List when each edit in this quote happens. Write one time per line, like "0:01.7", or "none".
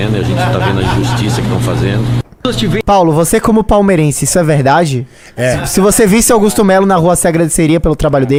none